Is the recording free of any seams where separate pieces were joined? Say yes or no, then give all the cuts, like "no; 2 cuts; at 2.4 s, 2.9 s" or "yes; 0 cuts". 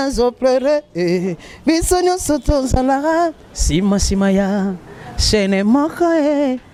yes; 0 cuts